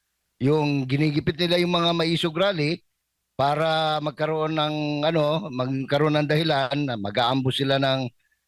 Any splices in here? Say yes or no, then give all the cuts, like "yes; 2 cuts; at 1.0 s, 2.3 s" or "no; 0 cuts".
no; 0 cuts